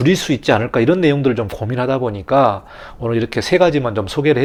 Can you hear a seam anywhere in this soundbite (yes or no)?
no